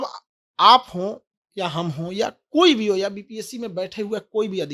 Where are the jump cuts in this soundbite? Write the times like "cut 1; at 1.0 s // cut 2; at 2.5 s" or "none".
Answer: none